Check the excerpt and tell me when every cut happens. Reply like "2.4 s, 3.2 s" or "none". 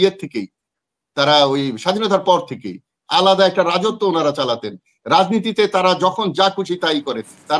none